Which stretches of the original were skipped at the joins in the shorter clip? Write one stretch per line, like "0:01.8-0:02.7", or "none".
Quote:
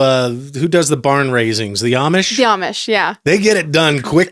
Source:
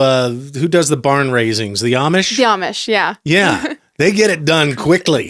0:03.2-0:03.9